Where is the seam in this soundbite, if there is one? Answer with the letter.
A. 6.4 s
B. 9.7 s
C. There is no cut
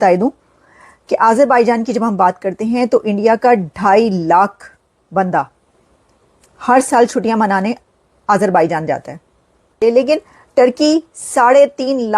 B